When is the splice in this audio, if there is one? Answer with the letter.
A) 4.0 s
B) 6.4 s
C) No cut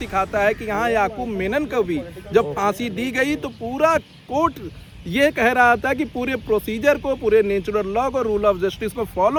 C